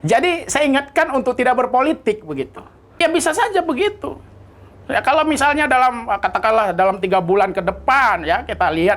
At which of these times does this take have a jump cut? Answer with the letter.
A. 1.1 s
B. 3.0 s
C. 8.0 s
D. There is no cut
B